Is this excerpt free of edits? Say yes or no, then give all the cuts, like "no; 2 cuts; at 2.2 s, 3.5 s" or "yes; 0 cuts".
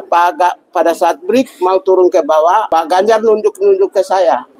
yes; 0 cuts